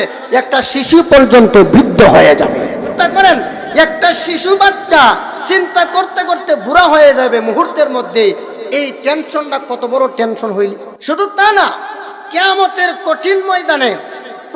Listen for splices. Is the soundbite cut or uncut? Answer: cut